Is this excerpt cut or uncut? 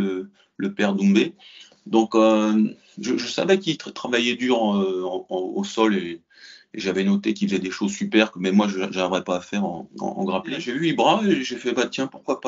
cut